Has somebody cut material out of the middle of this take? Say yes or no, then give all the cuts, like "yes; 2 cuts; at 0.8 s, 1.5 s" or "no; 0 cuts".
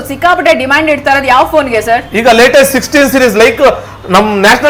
no; 0 cuts